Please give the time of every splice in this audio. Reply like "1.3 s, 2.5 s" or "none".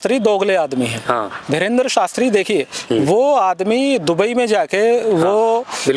none